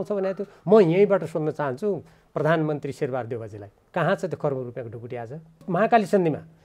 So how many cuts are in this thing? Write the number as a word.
one